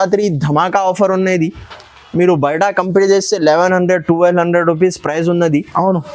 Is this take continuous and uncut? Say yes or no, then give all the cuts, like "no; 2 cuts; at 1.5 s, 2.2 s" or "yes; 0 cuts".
yes; 0 cuts